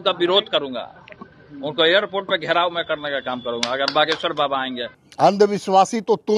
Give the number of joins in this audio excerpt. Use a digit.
1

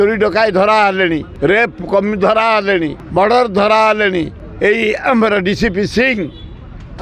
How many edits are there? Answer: 3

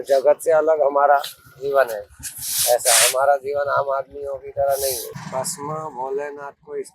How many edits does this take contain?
1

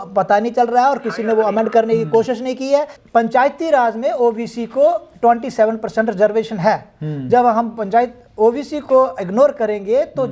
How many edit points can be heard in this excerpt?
1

